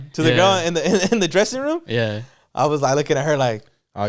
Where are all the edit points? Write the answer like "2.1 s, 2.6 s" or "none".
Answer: none

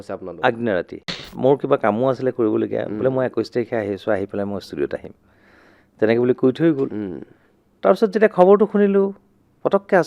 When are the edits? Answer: 1.3 s

